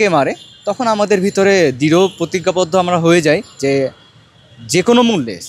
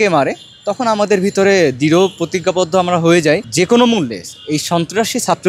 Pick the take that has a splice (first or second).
second